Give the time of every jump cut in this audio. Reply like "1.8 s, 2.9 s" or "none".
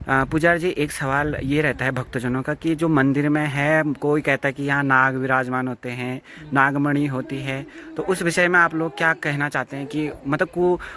none